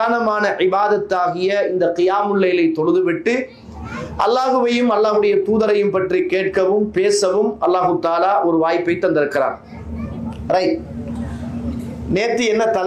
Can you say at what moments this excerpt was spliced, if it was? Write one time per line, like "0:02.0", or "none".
none